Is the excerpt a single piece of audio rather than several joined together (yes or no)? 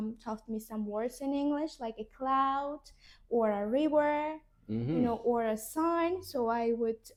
yes